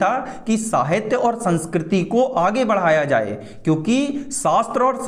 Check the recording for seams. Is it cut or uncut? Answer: uncut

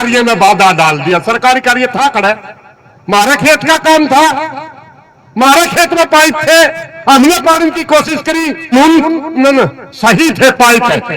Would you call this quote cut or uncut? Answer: cut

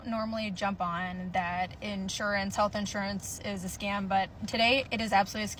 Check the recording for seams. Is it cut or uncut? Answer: uncut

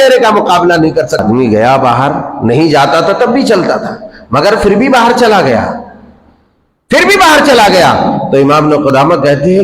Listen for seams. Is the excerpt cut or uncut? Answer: cut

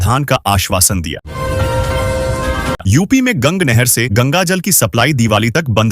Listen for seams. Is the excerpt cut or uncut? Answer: cut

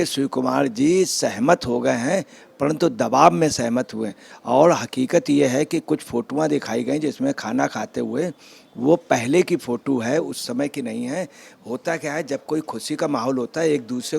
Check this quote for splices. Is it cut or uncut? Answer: uncut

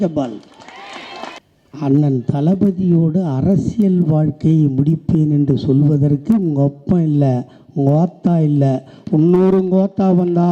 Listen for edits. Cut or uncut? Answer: cut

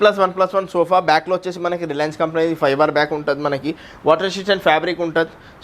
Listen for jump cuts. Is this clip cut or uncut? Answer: uncut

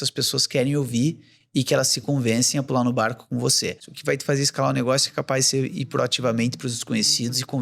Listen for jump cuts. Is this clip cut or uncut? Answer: cut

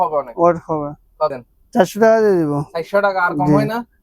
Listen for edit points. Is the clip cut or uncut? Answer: cut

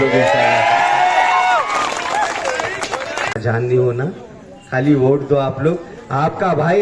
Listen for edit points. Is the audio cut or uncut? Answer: cut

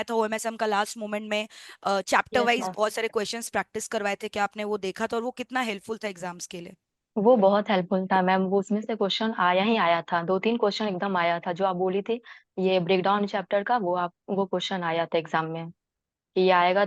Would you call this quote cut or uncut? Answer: uncut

